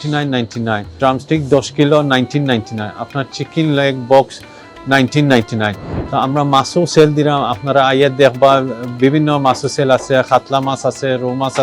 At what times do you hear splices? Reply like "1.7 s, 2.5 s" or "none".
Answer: 0.9 s